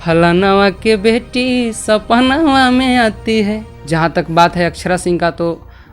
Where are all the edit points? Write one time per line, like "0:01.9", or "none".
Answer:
0:03.7